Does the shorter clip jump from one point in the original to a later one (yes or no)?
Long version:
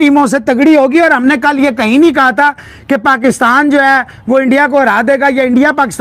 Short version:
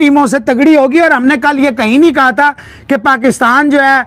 no